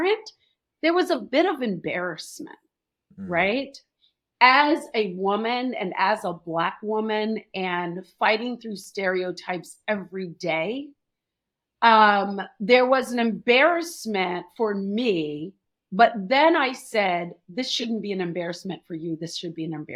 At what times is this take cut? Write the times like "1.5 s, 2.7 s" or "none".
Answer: none